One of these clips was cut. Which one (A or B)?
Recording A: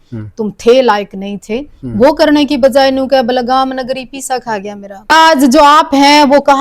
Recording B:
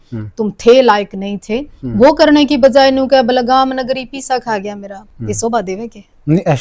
A